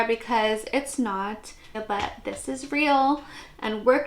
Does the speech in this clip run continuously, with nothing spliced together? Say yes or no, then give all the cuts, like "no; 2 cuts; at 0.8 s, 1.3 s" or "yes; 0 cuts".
no; 1 cut; at 1.8 s